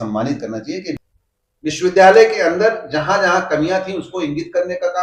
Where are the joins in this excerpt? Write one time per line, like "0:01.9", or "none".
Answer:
0:01.0